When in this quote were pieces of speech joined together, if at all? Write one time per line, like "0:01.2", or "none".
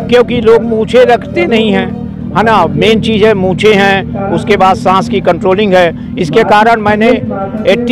none